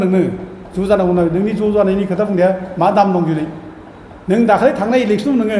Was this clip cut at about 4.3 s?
no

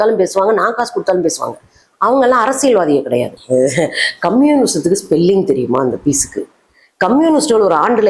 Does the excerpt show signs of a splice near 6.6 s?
no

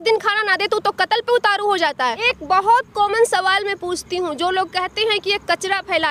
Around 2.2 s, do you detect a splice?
yes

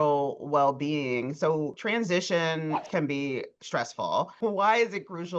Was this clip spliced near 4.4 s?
yes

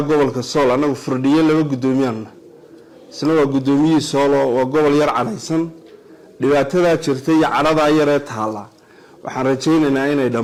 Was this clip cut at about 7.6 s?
no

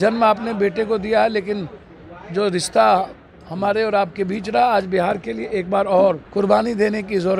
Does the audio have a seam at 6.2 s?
yes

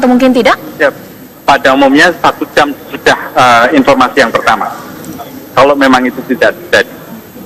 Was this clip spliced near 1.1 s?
yes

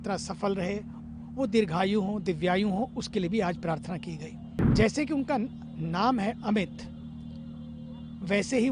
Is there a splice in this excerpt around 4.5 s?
yes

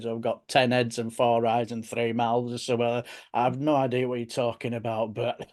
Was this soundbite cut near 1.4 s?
no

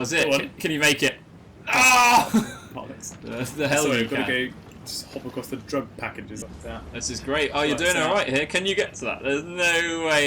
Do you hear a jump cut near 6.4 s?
yes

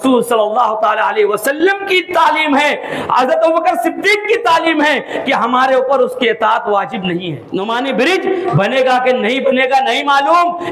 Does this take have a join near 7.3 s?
yes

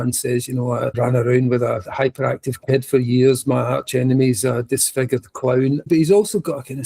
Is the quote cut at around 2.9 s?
no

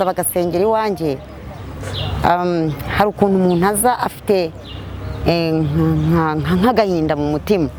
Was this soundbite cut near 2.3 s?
no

